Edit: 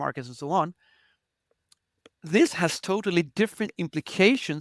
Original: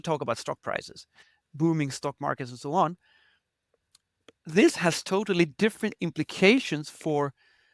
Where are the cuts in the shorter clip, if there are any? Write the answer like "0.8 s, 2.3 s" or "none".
none